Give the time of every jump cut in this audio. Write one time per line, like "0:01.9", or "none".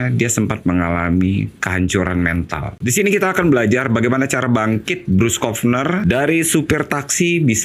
0:02.7